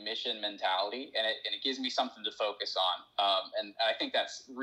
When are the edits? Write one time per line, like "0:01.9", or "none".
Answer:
none